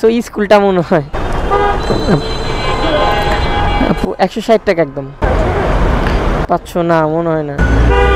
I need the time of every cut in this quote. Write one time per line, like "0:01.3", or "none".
none